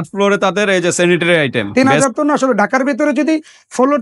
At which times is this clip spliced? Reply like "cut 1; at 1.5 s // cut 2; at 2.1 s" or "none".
cut 1; at 1.6 s